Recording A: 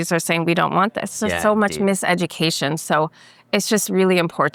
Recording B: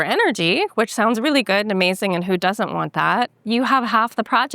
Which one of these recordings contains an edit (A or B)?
B